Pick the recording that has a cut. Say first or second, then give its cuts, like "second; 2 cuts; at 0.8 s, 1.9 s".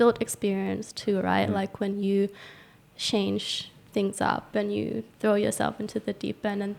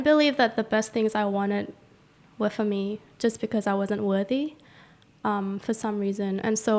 first; 1 cut; at 5.1 s